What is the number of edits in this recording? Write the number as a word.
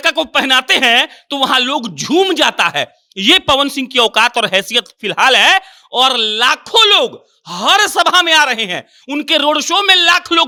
zero